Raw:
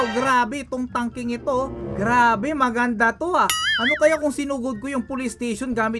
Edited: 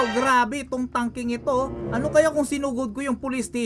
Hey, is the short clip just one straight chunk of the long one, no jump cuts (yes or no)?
no